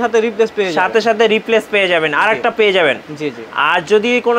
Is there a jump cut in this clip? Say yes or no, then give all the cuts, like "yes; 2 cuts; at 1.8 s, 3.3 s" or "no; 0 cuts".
no; 0 cuts